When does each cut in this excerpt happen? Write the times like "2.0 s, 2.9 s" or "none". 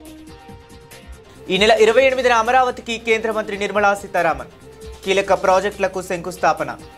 1.1 s